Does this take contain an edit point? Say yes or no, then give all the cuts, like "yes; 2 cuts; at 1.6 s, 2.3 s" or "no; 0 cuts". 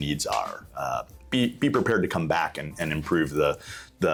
no; 0 cuts